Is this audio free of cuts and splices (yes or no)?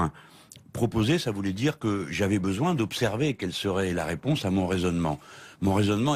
yes